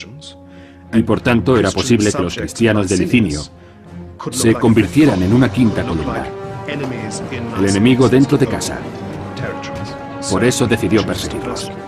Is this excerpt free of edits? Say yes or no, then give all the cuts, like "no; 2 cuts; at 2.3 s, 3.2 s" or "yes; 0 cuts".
yes; 0 cuts